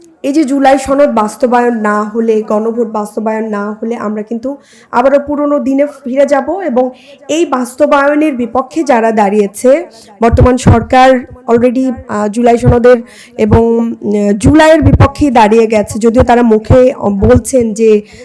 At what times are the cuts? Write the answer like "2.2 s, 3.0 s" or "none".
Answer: none